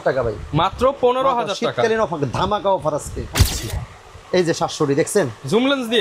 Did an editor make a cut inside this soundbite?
yes; 1 cut; at 3.3 s

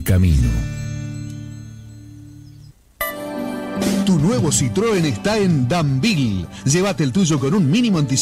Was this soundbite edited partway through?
yes; 1 cut; at 2.7 s

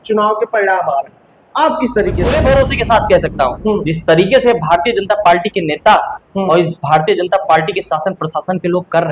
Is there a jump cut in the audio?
yes; 1 cut; at 2.2 s

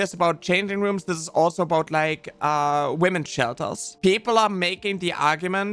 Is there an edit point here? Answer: no; 0 cuts

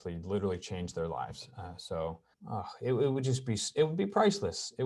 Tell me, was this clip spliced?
yes; 1 cut; at 2.3 s

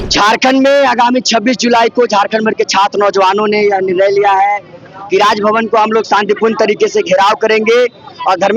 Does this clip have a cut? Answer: no; 0 cuts

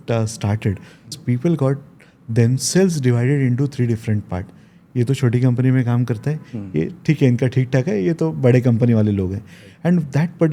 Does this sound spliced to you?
yes; 1 cut; at 1.1 s

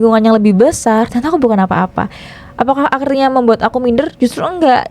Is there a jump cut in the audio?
no; 0 cuts

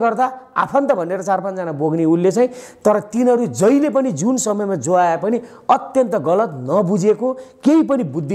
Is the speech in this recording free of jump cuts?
yes; 0 cuts

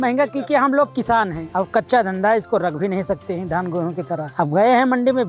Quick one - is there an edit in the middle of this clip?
yes; 2 cuts; at 1.4 s, 4.3 s

